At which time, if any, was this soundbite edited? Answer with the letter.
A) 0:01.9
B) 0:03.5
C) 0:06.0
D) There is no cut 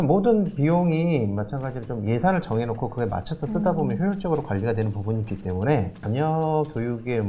C